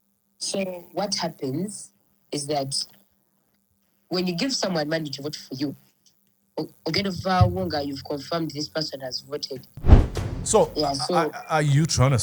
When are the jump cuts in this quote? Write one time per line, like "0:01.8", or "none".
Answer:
0:09.7